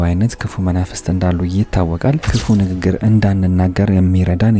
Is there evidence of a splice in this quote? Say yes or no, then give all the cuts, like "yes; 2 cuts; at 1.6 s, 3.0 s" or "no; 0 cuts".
yes; 1 cut; at 2.3 s